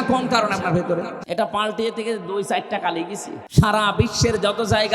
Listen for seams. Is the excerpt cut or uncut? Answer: cut